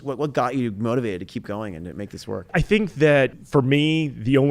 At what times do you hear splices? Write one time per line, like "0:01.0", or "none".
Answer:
0:02.5
0:03.4